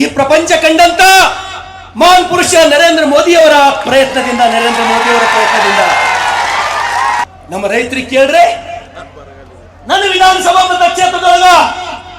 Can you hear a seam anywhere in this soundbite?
yes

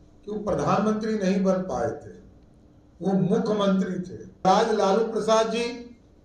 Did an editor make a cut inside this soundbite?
yes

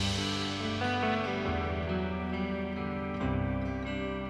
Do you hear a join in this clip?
no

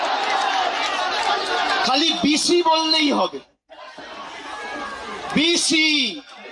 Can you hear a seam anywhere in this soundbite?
no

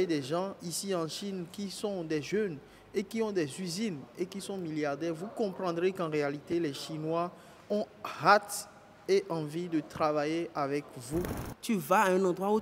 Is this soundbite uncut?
no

